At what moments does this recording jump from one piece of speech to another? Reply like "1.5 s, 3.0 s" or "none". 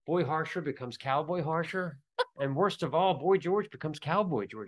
none